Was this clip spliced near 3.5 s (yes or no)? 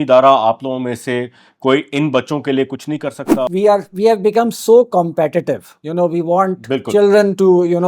yes